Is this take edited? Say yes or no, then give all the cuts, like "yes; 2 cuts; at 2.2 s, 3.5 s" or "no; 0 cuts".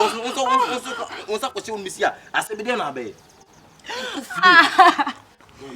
yes; 1 cut; at 4.2 s